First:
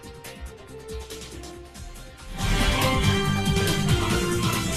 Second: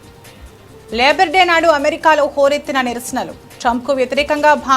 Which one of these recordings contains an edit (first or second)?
second